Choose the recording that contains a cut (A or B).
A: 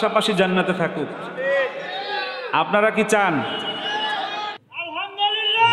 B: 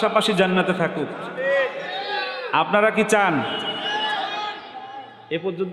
A